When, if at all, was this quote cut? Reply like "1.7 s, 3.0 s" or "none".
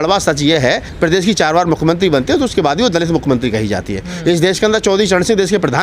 0.9 s